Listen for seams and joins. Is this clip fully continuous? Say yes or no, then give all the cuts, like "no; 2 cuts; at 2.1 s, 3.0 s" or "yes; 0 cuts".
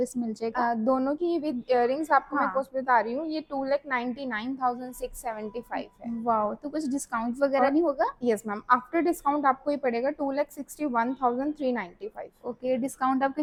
yes; 0 cuts